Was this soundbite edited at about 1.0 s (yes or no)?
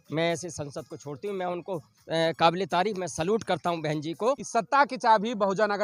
no